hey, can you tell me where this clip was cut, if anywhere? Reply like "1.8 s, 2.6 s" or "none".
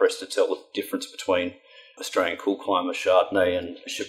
none